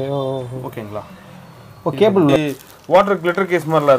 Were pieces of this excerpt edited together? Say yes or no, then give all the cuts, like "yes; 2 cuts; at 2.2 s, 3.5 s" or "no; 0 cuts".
yes; 1 cut; at 2.4 s